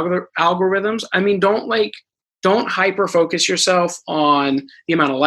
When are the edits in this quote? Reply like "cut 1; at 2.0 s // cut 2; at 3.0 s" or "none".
none